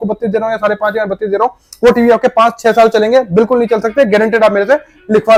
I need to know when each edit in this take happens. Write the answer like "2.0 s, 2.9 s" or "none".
none

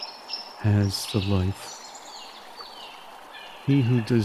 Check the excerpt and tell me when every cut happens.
1.5 s, 3.2 s

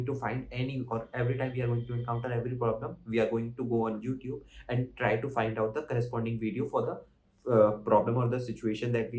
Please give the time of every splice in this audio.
none

